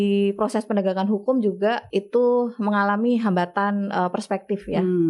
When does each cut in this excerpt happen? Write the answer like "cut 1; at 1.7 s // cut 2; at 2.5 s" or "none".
cut 1; at 1.8 s